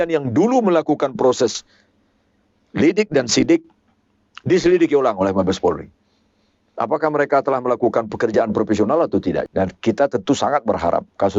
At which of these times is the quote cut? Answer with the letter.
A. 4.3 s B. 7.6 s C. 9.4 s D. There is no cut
C